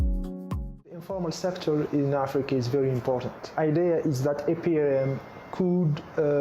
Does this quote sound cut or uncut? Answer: cut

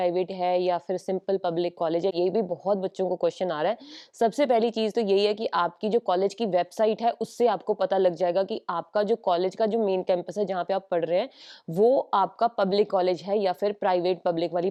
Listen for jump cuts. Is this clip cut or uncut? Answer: uncut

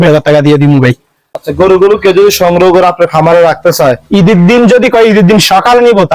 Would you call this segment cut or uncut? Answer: cut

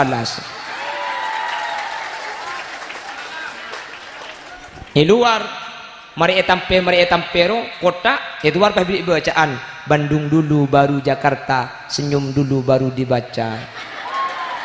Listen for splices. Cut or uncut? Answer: uncut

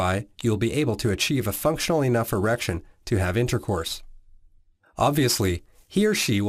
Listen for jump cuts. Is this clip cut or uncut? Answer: uncut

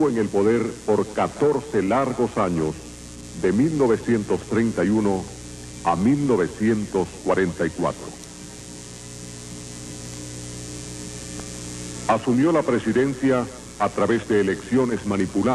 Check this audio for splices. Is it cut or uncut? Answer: cut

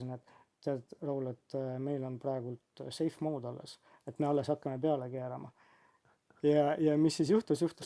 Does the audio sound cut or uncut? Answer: uncut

